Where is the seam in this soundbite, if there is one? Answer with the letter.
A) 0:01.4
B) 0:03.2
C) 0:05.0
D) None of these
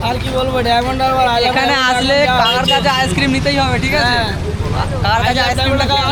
D